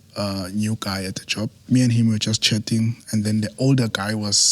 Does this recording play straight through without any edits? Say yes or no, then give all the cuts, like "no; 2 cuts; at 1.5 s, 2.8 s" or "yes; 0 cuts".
no; 1 cut; at 1.6 s